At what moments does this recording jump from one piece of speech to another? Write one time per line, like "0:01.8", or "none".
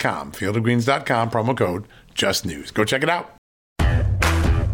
0:03.8